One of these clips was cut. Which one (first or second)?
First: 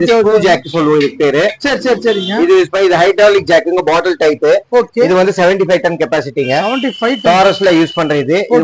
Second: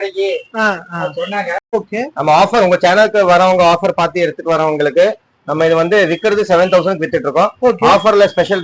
second